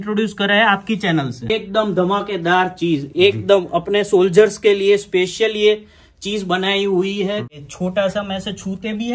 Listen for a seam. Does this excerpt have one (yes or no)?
yes